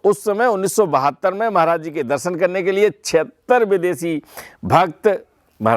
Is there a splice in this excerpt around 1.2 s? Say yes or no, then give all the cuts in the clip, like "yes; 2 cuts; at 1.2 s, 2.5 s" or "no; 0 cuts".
no; 0 cuts